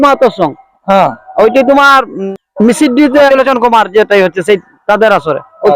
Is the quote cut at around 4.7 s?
no; 2 cuts; at 2.2 s, 3.3 s

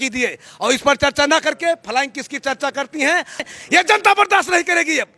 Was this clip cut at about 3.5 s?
yes; 1 cut; at 3.5 s

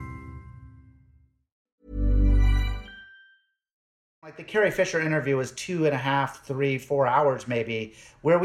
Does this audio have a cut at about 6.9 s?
no; 2 cuts; at 1.7 s, 4.0 s

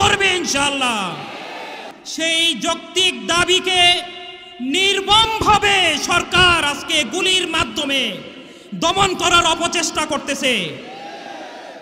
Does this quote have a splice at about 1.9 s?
yes; 1 cut; at 1.9 s

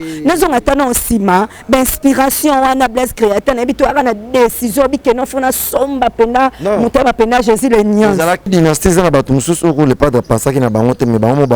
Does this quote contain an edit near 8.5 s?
yes; 1 cut; at 8.5 s

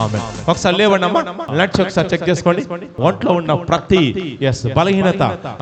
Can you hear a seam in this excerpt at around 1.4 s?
yes; 2 cuts; at 1.4 s, 2.9 s

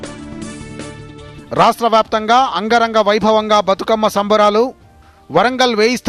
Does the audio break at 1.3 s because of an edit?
yes; 1 cut; at 1.3 s

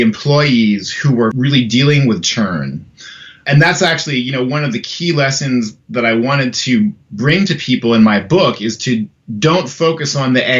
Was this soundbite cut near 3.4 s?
yes; 2 cuts; at 1.4 s, 3.4 s

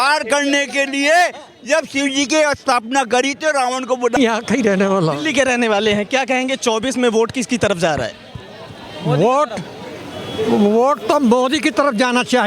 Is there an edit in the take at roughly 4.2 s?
yes; 1 cut; at 4.2 s

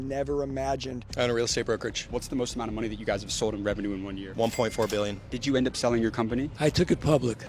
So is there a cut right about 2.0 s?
yes; 4 cuts; at 1.0 s, 2.0 s, 4.2 s, 5.3 s

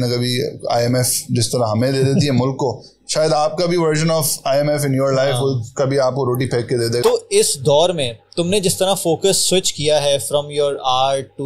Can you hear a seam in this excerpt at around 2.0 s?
no; 1 cut; at 7.0 s

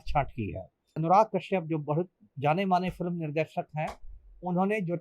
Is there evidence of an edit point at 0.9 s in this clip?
yes; 1 cut; at 0.9 s

